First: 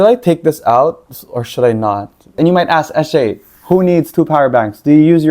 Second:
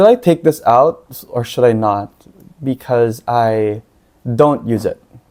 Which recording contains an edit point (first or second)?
first